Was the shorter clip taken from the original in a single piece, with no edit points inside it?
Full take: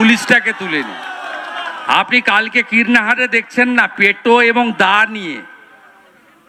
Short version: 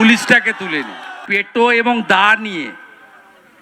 no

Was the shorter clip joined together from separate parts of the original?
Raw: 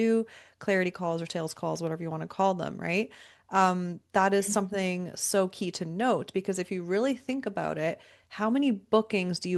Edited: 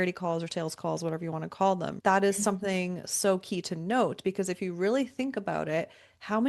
yes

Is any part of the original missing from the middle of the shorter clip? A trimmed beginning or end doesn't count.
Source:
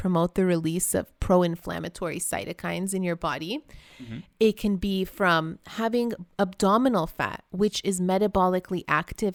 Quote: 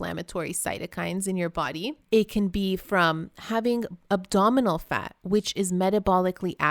yes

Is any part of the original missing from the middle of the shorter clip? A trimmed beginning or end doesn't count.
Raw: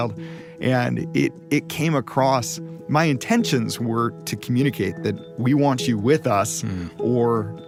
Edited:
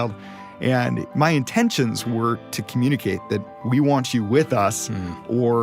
yes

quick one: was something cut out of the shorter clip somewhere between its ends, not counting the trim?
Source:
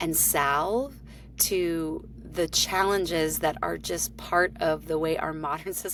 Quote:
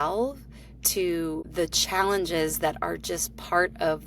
yes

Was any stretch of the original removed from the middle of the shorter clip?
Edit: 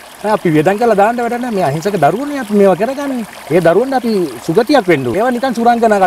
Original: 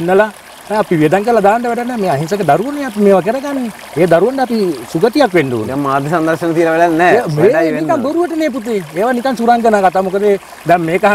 yes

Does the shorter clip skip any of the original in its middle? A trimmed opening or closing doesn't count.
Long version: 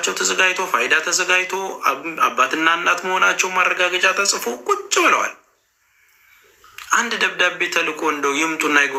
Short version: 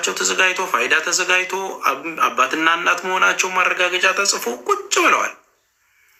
no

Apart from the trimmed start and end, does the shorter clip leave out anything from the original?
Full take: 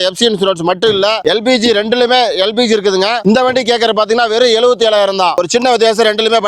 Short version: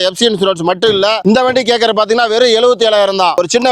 yes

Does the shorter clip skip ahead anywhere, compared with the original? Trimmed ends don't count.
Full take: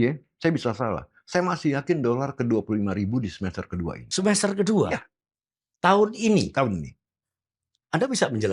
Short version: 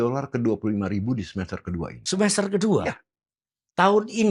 no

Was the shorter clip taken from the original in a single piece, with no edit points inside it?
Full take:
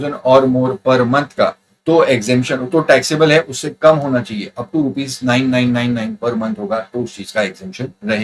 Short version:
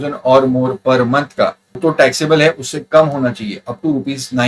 no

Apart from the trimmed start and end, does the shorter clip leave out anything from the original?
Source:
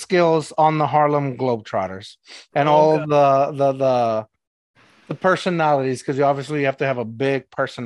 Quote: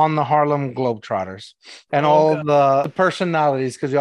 yes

